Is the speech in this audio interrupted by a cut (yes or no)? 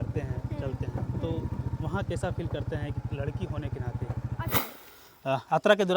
yes